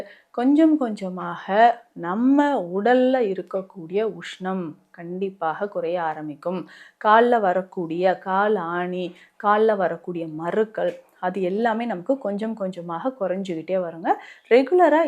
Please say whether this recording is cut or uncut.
uncut